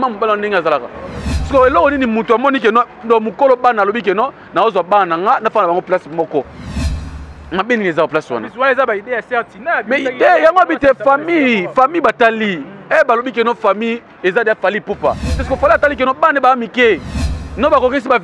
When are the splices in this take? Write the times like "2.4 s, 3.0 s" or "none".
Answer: 1.3 s, 15.4 s